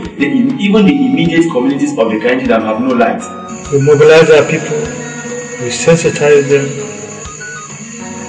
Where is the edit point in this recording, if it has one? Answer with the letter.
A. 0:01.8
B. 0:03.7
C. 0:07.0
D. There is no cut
B